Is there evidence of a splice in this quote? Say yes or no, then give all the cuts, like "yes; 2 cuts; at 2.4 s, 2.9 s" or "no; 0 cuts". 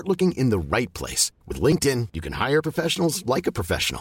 no; 0 cuts